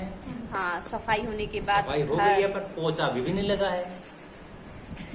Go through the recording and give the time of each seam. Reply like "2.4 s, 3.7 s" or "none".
none